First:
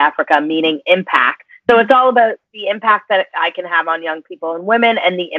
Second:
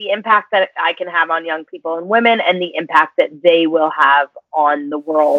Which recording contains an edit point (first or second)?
first